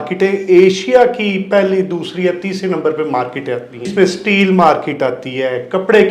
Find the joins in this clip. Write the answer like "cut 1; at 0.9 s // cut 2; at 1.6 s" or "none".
cut 1; at 3.9 s